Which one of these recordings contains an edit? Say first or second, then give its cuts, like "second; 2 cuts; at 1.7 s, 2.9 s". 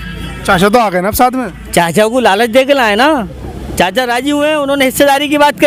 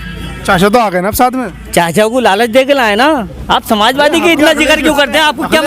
second; 1 cut; at 3.3 s